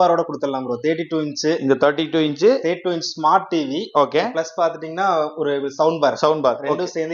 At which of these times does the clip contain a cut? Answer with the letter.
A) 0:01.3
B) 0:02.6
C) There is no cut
C